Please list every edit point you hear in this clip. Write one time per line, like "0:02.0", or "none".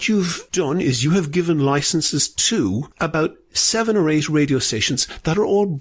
0:02.9